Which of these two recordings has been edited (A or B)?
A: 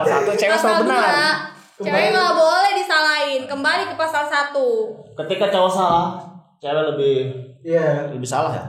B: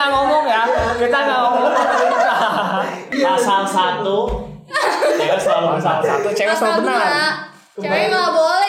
B